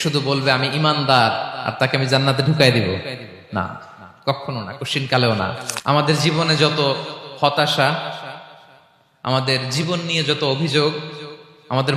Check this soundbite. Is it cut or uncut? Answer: cut